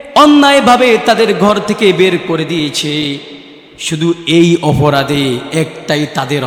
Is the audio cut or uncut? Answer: uncut